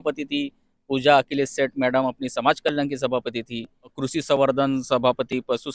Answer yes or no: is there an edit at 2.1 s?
no